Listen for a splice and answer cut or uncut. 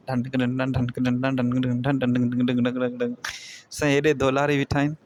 uncut